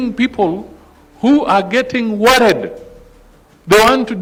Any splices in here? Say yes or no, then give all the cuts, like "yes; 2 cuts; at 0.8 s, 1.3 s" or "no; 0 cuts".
no; 0 cuts